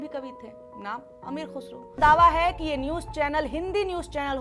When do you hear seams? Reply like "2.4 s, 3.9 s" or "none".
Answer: 2.0 s